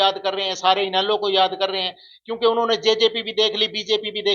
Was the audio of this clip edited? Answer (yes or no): no